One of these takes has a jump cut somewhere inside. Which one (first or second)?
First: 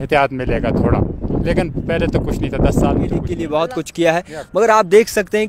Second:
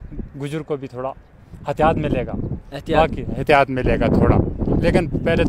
first